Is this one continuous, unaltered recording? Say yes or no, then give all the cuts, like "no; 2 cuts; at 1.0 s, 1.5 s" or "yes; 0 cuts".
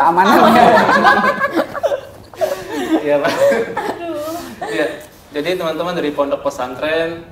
yes; 0 cuts